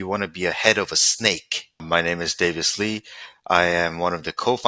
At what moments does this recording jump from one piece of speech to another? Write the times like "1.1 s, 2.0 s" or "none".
1.8 s